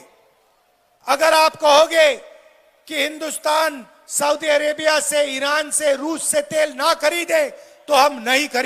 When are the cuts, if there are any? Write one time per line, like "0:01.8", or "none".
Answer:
none